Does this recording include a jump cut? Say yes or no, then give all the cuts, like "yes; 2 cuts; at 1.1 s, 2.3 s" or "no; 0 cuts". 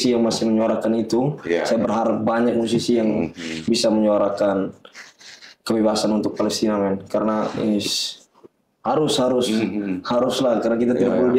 no; 0 cuts